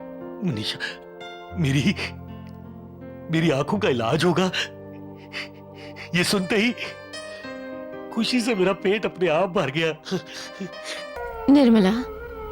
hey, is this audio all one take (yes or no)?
no